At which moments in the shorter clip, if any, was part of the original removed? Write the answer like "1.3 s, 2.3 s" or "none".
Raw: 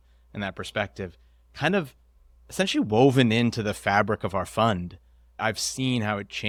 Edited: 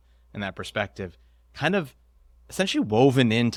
none